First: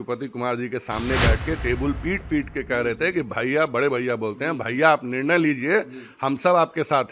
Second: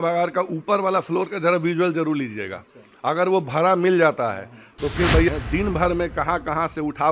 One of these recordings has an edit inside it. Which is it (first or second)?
second